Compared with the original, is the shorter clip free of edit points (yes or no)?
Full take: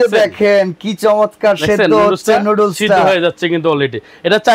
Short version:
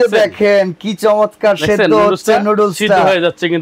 yes